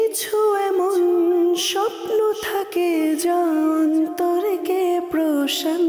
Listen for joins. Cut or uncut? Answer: uncut